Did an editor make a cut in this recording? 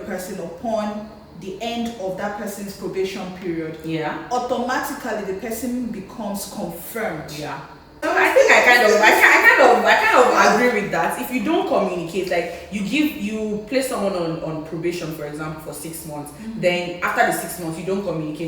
yes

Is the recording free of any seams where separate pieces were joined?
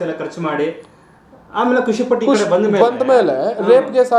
yes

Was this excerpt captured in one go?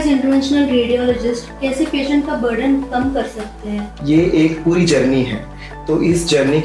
no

